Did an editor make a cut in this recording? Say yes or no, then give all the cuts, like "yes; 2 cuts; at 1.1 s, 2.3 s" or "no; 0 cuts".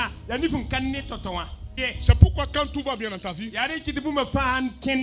yes; 1 cut; at 2.0 s